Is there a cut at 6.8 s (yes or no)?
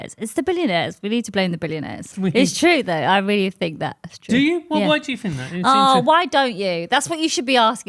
no